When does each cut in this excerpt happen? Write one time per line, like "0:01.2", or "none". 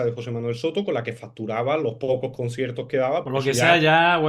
0:03.2